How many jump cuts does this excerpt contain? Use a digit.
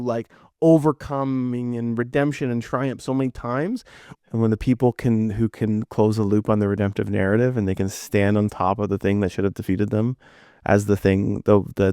1